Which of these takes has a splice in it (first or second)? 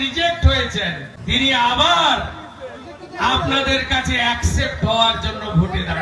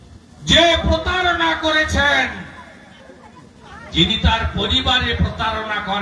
first